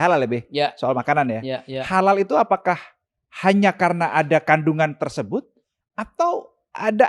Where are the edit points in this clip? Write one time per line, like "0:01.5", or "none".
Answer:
none